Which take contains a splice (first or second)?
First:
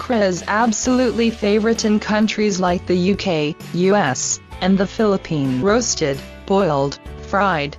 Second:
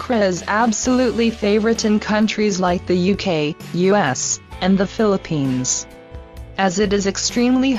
second